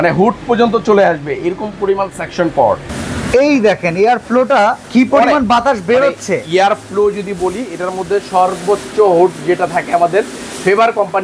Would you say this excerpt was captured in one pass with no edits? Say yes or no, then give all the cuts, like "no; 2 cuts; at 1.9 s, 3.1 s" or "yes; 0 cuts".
no; 2 cuts; at 2.9 s, 4.8 s